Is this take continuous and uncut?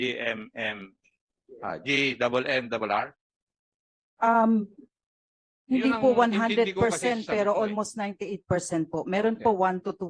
yes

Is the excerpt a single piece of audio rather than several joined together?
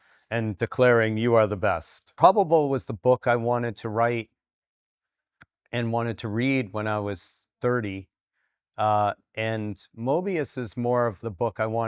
no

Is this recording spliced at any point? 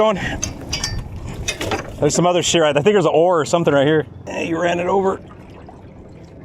no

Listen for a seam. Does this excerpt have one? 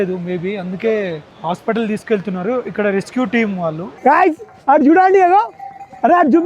yes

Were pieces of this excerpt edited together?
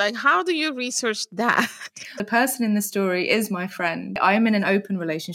yes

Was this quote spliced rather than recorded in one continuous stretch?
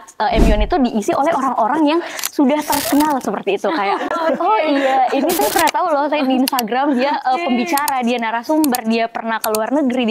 no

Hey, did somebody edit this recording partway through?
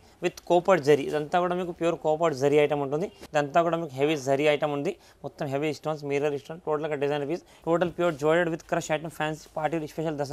yes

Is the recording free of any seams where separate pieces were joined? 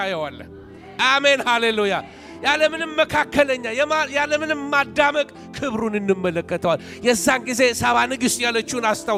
yes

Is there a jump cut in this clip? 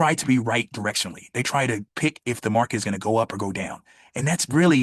no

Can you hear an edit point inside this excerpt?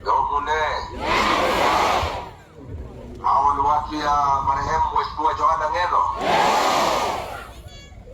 no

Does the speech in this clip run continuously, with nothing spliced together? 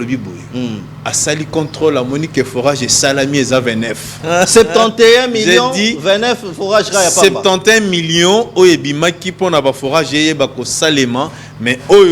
no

